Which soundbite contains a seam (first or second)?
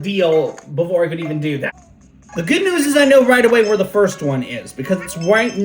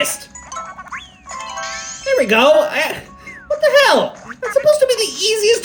first